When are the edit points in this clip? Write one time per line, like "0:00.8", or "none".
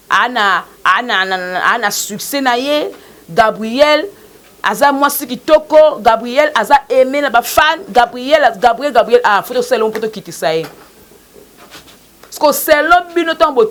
none

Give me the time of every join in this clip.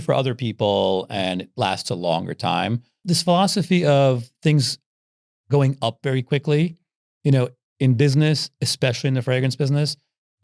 0:03.0

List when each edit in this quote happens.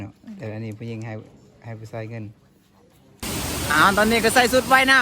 0:03.2

